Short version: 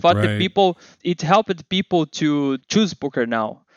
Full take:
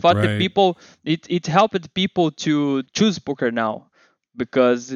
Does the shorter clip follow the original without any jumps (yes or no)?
no